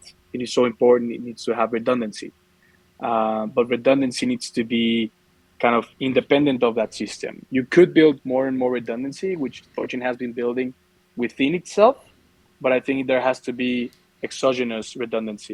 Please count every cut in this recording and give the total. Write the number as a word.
zero